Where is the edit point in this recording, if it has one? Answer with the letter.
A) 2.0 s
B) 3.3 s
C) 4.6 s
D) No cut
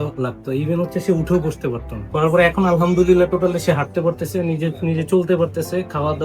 A